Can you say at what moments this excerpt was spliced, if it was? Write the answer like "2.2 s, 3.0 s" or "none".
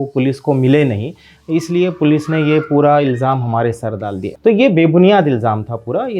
4.2 s